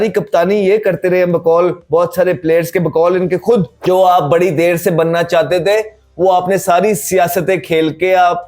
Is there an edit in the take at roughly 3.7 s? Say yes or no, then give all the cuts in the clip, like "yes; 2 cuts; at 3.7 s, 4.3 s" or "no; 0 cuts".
yes; 1 cut; at 3.7 s